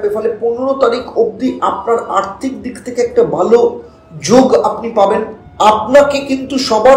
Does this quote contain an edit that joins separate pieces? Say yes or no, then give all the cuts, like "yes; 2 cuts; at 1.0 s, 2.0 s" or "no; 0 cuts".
yes; 1 cut; at 5.4 s